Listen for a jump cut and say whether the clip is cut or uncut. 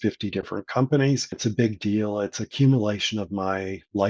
cut